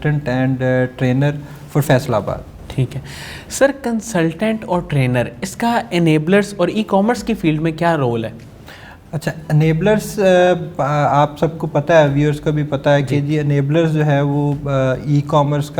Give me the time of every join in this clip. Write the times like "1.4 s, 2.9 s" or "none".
none

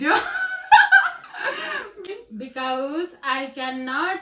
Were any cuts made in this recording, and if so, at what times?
2.1 s

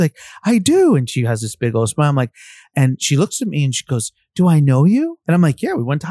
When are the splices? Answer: 2.7 s, 5.2 s

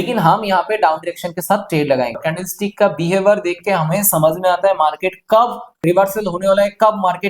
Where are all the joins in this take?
2.2 s

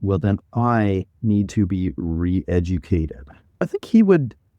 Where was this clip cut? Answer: 3.6 s

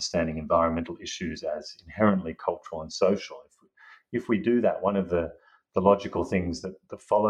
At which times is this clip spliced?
none

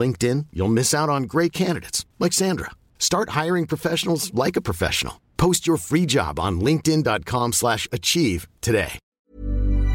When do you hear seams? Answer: 9.0 s

